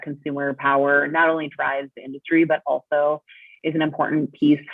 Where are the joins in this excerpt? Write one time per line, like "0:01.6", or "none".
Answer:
none